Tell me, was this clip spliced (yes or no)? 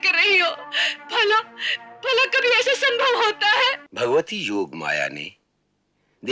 yes